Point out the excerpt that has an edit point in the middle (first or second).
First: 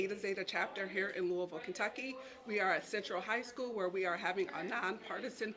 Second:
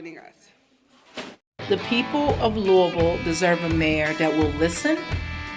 second